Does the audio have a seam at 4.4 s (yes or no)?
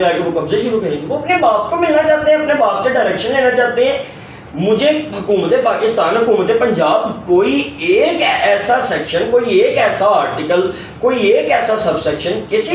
no